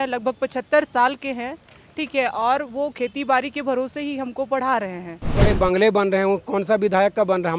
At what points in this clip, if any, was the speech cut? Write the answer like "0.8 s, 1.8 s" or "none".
5.5 s